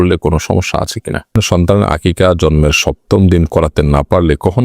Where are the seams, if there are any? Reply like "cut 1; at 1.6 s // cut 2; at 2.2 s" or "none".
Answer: cut 1; at 1.4 s